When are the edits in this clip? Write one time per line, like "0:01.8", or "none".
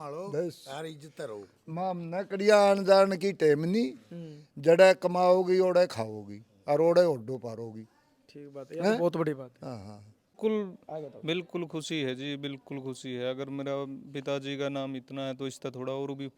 0:10.4